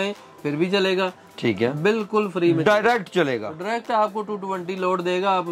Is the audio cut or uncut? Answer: uncut